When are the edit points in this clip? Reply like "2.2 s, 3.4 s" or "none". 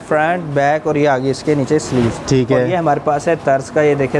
none